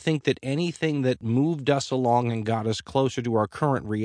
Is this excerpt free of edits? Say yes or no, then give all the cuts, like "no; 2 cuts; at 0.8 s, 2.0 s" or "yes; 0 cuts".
no; 1 cut; at 1.2 s